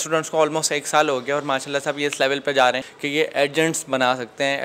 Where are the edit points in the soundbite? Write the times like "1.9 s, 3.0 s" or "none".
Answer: 2.9 s

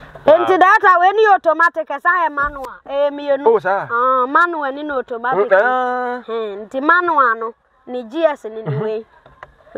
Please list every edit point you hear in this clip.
none

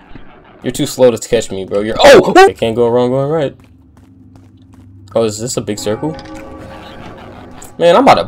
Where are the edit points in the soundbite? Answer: 2.5 s

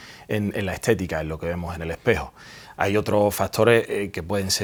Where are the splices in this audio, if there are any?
none

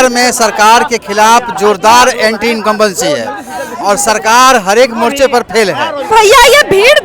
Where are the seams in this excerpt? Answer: 6.1 s

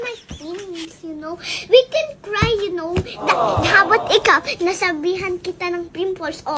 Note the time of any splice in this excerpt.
none

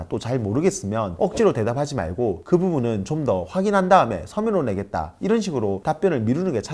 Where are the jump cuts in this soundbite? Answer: none

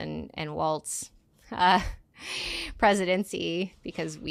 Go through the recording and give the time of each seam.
none

